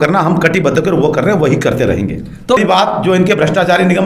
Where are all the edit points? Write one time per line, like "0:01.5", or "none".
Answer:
0:02.6